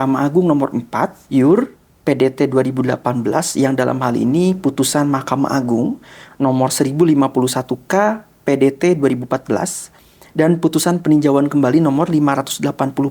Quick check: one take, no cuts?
no; 1 cut; at 1.2 s

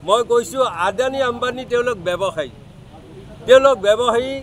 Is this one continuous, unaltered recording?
yes; 0 cuts

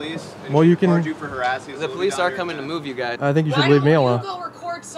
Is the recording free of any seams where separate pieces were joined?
no; 1 cut; at 3.2 s

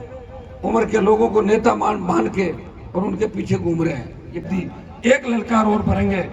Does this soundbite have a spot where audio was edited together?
yes; 1 cut; at 4.5 s

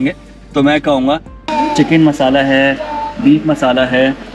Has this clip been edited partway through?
yes; 1 cut; at 1.3 s

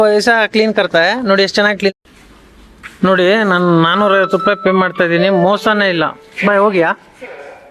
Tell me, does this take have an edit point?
yes; 1 cut; at 1.9 s

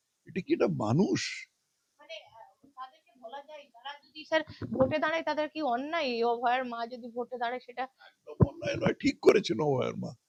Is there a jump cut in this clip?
no; 0 cuts

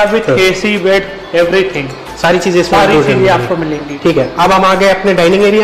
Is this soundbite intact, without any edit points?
yes; 0 cuts

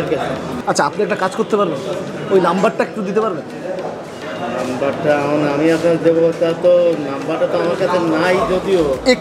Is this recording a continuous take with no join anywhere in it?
yes; 0 cuts

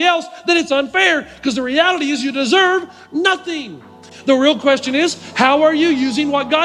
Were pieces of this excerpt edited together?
yes; 1 cut; at 4.0 s

